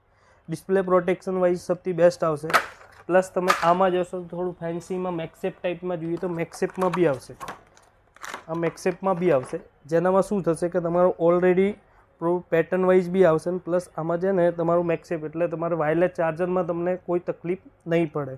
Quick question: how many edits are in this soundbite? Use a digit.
0